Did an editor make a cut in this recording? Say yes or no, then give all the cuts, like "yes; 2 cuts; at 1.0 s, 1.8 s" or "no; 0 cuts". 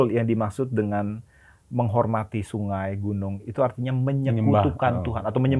no; 0 cuts